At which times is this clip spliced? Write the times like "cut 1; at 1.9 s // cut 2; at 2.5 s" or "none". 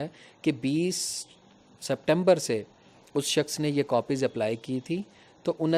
none